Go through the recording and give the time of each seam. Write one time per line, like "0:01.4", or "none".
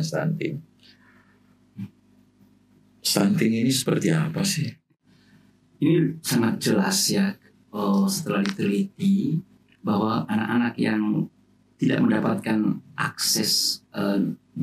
0:04.9